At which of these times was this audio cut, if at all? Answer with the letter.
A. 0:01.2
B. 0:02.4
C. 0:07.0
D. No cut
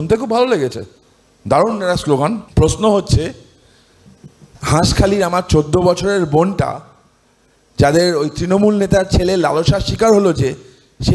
B